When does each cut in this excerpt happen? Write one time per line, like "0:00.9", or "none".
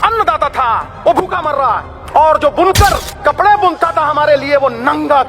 0:00.9
0:01.9
0:03.1